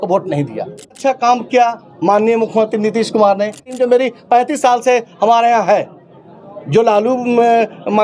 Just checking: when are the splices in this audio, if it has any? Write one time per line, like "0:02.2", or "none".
0:01.0
0:03.7